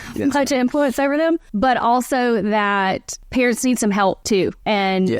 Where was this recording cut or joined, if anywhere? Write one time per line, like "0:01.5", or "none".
0:01.5
0:03.1
0:04.4